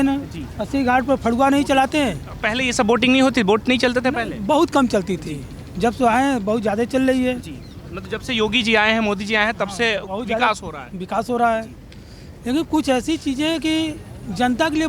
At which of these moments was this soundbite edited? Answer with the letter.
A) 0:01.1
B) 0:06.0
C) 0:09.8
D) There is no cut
D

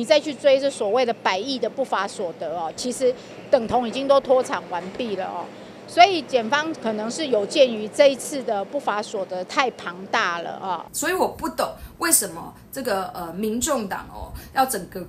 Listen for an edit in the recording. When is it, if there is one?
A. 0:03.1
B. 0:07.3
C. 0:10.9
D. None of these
C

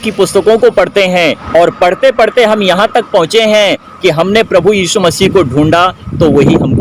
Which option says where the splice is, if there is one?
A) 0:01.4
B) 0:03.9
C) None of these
A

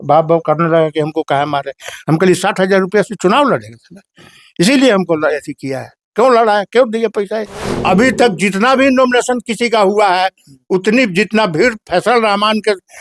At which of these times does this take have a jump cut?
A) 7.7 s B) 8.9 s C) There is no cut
A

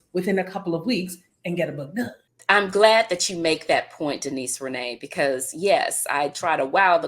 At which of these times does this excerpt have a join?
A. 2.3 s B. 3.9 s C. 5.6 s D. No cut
A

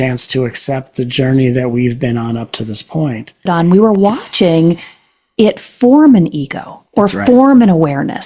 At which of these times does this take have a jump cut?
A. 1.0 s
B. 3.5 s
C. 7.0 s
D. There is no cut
B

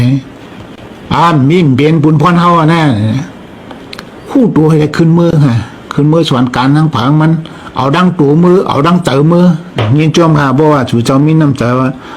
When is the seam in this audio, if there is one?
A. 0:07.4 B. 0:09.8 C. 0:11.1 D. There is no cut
B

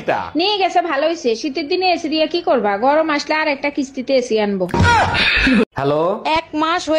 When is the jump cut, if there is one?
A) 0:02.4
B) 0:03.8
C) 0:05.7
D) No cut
C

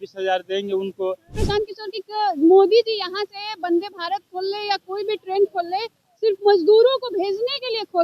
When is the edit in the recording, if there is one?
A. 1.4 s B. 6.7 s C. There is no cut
A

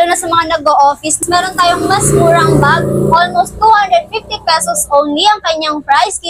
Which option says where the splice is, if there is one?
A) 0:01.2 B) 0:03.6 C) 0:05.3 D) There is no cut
A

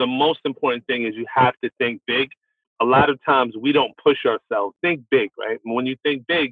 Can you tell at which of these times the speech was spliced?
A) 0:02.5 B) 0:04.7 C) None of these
B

